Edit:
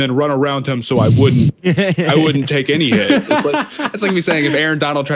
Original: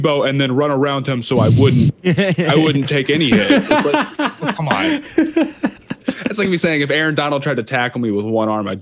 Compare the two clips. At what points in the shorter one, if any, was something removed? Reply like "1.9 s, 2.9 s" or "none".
3.9 s